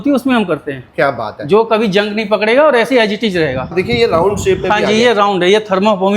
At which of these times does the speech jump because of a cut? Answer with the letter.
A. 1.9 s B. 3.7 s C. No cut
B